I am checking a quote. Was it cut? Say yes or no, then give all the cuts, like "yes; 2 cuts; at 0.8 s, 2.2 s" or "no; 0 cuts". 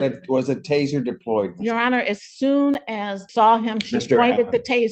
yes; 1 cut; at 3.2 s